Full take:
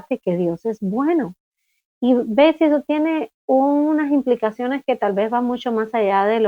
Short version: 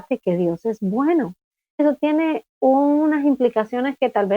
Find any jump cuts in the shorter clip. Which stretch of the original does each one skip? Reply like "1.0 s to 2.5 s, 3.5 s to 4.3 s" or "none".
1.8 s to 2.7 s